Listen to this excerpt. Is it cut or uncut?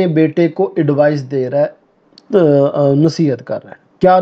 uncut